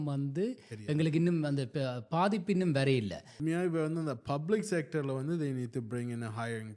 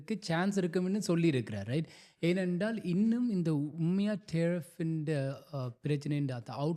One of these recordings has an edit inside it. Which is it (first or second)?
first